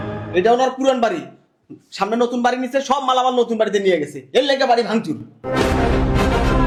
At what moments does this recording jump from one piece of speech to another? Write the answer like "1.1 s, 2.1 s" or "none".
none

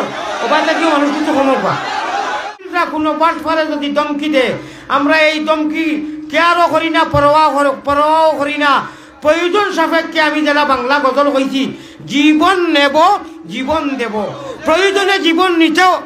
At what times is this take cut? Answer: 2.6 s

